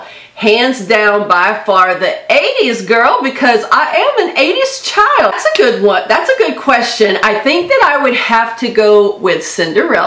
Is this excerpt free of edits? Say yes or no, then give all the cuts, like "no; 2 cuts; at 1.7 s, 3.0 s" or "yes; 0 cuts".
no; 1 cut; at 5.3 s